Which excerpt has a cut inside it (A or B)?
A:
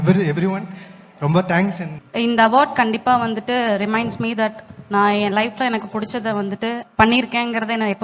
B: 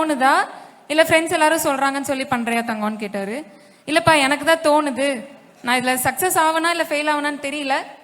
A